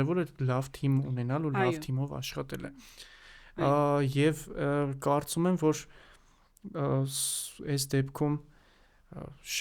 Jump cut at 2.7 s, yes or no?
no